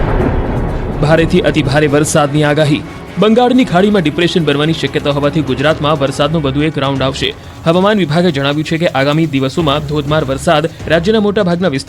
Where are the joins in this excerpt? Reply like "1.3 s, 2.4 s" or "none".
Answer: 7.7 s